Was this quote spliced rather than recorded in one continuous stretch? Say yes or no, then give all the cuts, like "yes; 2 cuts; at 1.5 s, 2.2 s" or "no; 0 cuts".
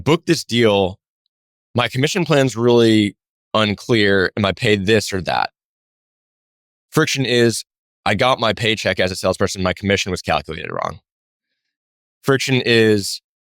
no; 0 cuts